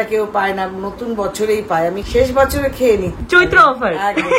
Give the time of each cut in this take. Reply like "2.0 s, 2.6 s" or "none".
2.0 s